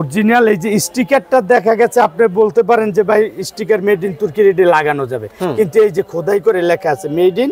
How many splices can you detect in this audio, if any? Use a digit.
0